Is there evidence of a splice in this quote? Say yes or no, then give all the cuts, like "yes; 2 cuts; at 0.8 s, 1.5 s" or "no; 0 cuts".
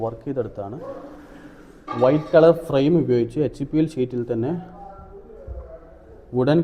no; 0 cuts